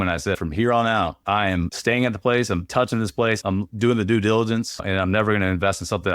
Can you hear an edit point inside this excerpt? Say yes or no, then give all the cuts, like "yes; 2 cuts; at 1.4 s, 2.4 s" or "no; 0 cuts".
yes; 1 cut; at 4.8 s